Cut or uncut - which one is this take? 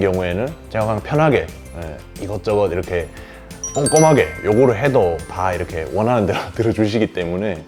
uncut